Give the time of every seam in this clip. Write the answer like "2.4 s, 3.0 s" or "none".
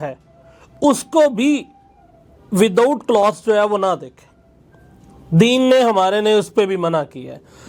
none